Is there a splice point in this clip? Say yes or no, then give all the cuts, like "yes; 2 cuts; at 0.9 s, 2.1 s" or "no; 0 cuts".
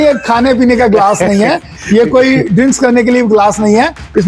no; 0 cuts